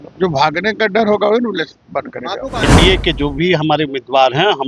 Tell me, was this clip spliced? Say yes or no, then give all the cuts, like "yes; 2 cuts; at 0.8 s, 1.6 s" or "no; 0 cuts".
yes; 1 cut; at 2.6 s